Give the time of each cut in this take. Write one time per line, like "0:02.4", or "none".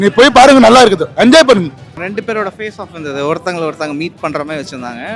0:02.0

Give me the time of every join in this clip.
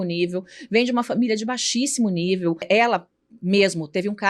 0:02.7

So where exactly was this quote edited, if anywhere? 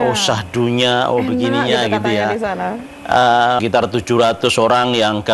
0:03.6

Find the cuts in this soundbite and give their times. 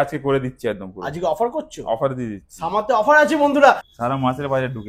0:03.9

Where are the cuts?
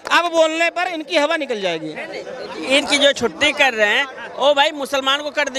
none

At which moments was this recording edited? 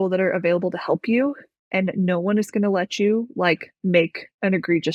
none

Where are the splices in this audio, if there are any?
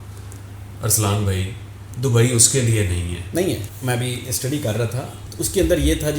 0:03.7

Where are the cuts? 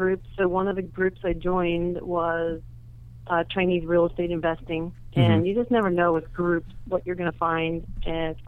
none

